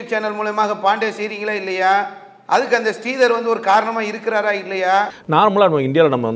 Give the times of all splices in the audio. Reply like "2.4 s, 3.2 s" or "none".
5.2 s